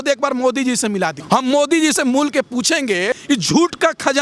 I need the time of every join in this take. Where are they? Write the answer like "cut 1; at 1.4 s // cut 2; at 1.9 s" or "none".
cut 1; at 1.2 s // cut 2; at 3.2 s